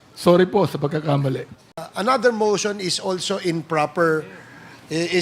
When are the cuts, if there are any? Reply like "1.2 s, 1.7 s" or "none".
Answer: 1.9 s

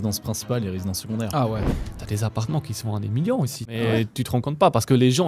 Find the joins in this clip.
1.6 s, 3.6 s

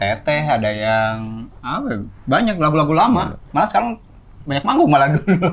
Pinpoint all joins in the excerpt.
none

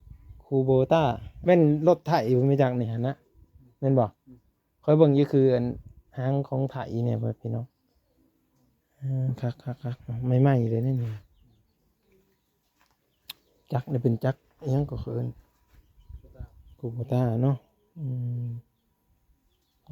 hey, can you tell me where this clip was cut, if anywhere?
1.3 s

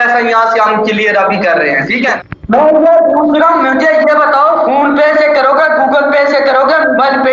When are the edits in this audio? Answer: 2.2 s

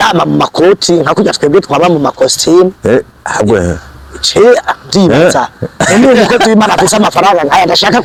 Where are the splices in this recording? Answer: none

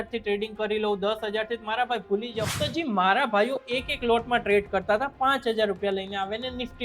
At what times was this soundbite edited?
2.5 s

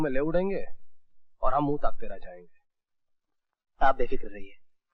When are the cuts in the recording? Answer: none

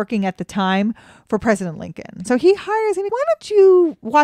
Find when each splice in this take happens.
2.2 s, 3.1 s

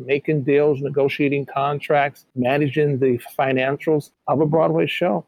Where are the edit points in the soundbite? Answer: 2.2 s, 4.1 s

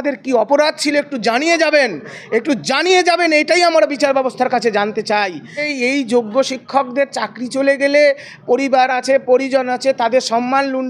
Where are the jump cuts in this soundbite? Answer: 5.7 s

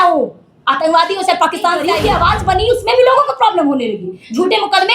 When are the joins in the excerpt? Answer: 2.0 s

